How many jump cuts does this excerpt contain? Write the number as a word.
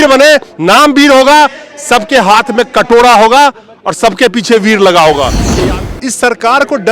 one